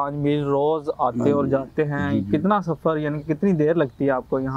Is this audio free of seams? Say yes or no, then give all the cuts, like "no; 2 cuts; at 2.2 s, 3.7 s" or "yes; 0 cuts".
yes; 0 cuts